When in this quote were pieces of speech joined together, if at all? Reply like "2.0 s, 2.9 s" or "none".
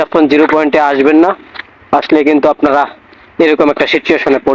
none

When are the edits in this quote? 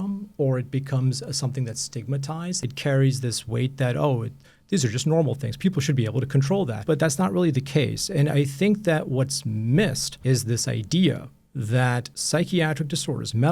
2.6 s, 6.8 s, 10.1 s, 12.1 s

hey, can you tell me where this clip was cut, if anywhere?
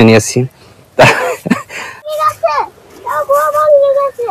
2.1 s

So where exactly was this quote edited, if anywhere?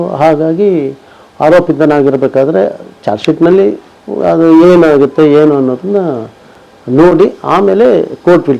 none

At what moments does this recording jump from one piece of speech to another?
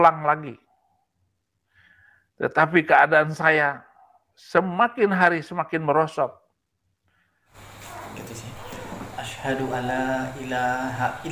7.5 s

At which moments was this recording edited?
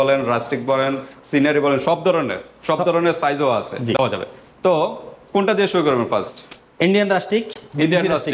none

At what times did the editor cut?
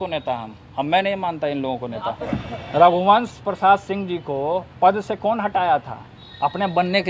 2.3 s

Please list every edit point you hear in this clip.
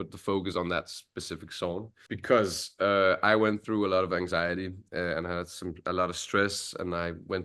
1.9 s

